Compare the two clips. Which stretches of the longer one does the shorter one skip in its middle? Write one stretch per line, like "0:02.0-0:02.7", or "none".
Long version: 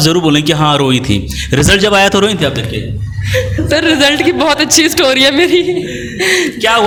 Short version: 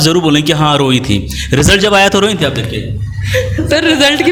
none